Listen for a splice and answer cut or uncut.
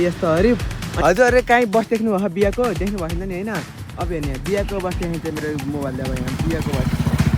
cut